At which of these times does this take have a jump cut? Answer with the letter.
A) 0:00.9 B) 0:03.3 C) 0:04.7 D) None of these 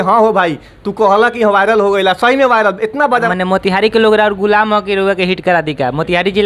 B